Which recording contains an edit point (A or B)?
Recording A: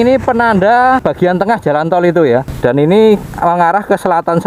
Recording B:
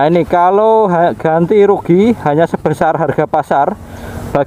A